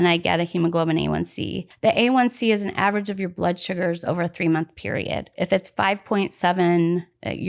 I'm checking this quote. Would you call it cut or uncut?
cut